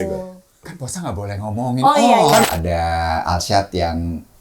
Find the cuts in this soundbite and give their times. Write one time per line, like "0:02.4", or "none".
0:02.4